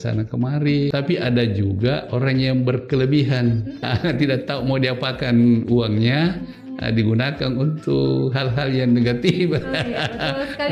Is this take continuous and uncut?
no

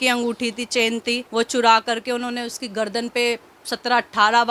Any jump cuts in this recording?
yes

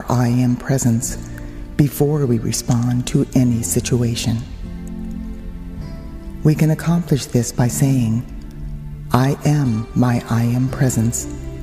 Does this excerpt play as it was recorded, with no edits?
yes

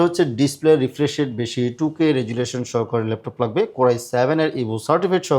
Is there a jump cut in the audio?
no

